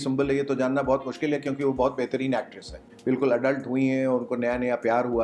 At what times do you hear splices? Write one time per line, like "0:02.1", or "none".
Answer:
0:02.9